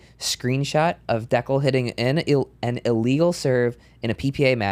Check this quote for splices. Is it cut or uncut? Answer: uncut